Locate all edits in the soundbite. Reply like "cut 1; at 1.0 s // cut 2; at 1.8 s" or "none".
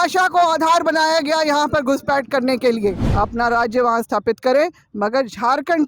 cut 1; at 3.0 s